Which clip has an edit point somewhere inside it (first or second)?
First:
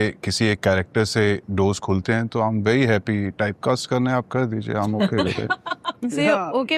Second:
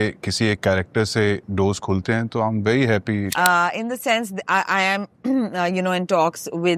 second